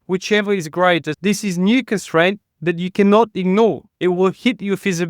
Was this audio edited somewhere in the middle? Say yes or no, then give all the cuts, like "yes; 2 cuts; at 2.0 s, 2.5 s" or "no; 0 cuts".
yes; 1 cut; at 1.1 s